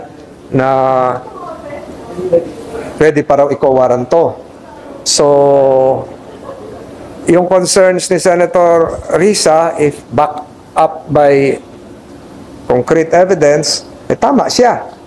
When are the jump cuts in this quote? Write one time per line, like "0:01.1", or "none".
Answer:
none